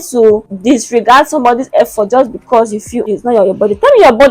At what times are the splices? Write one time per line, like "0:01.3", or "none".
0:03.1